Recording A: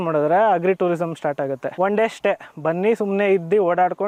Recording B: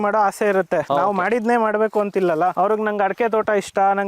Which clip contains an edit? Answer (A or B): B